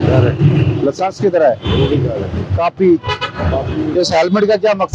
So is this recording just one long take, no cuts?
yes; 0 cuts

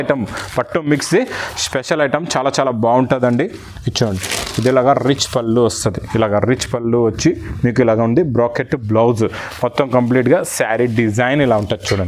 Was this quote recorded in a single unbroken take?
yes; 0 cuts

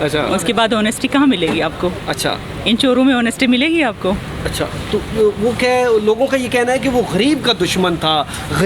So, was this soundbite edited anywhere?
no; 0 cuts

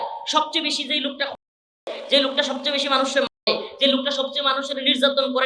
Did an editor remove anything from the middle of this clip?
yes; 1 cut; at 1.3 s

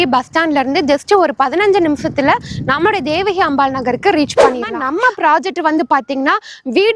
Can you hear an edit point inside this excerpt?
yes; 1 cut; at 4.8 s

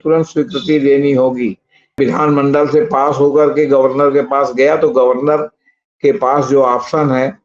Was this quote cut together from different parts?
yes; 1 cut; at 2.0 s

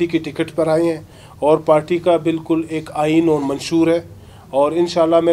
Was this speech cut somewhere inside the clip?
no; 0 cuts

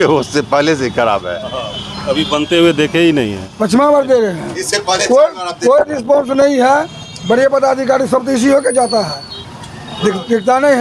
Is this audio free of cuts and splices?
no; 1 cut; at 3.4 s

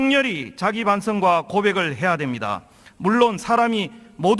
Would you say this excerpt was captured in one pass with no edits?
no; 1 cut; at 1.9 s

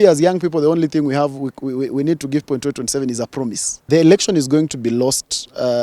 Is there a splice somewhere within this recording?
yes; 1 cut; at 3.7 s

